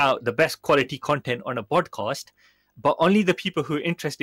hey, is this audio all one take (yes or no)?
yes